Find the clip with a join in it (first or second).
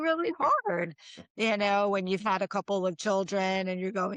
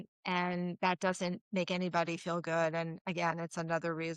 second